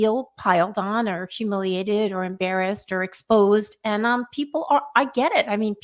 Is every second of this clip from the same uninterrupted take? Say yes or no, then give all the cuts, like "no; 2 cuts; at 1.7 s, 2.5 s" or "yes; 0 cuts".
yes; 0 cuts